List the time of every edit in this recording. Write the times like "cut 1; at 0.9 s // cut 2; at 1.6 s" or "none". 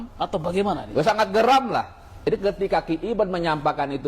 cut 1; at 2.3 s